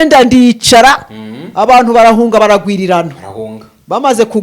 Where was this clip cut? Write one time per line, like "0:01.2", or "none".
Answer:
none

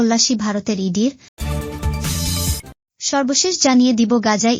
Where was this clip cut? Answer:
0:01.3
0:02.8

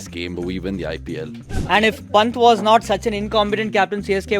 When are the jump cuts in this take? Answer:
0:01.4

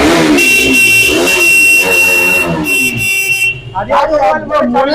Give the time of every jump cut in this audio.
none

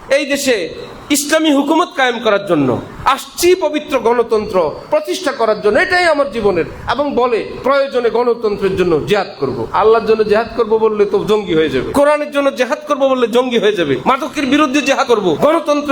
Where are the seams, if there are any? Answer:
0:09.7
0:11.9
0:14.0
0:15.2

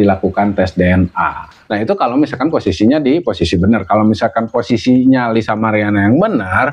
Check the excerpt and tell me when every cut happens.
0:01.5

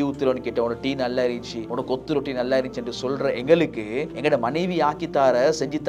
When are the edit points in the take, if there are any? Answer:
0:01.6
0:04.1

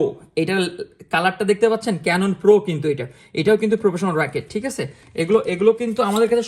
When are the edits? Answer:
none

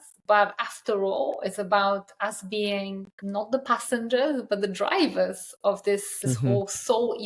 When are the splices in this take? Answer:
0:03.1
0:06.1

